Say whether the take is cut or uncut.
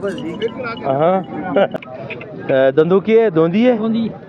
cut